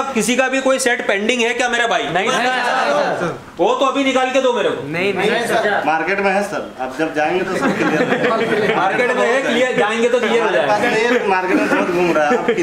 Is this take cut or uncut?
uncut